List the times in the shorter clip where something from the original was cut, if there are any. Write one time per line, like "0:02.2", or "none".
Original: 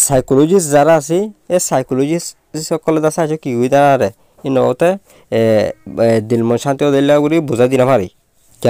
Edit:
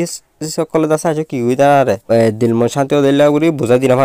0:02.0